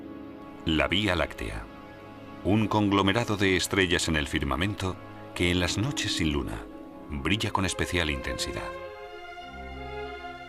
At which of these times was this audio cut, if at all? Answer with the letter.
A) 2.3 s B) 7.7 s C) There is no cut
B